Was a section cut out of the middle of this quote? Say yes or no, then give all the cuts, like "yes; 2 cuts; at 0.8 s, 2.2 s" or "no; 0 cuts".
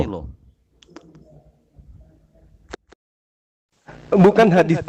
no; 0 cuts